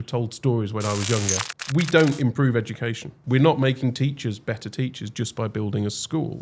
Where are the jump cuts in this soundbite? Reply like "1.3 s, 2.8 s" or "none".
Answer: 1.5 s, 3.2 s